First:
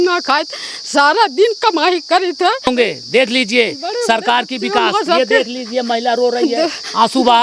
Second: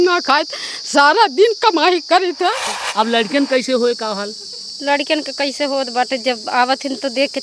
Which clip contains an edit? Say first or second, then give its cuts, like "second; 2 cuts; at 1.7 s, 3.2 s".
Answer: second; 1 cut; at 2.6 s